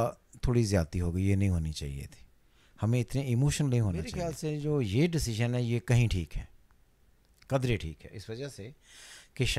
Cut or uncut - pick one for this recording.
cut